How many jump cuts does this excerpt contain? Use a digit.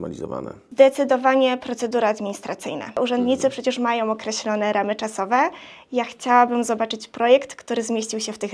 1